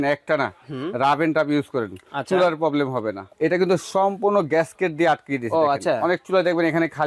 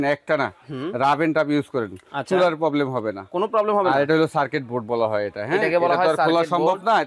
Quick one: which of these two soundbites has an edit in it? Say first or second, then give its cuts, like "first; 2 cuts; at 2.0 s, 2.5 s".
first; 1 cut; at 3.3 s